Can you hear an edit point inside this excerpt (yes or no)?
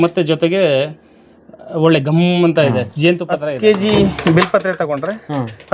yes